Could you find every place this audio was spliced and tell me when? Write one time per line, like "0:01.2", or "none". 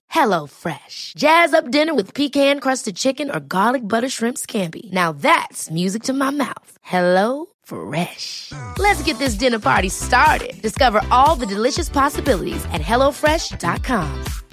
none